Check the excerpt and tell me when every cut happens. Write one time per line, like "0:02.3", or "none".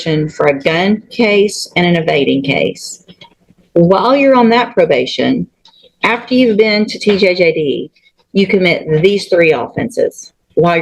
none